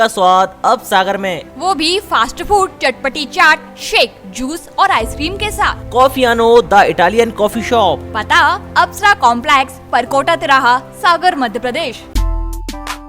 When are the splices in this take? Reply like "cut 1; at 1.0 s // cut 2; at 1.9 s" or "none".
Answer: cut 1; at 12.0 s